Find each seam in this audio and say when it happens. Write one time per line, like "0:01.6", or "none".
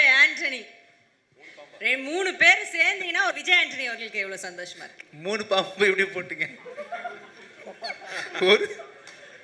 0:03.3